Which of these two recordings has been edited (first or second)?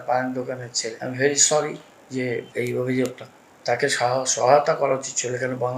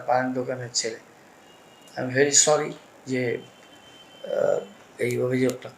first